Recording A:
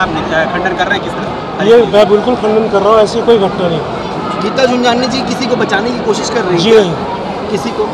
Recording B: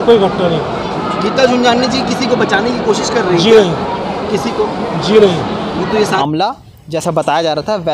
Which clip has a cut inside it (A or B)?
B